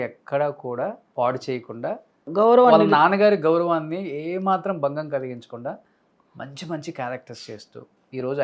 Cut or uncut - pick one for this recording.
cut